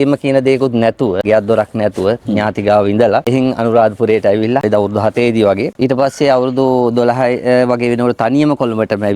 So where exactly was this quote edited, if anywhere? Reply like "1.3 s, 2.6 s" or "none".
none